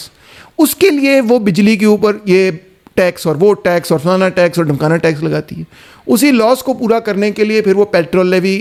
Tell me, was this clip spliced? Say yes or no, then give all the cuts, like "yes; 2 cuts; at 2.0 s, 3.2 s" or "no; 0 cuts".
no; 0 cuts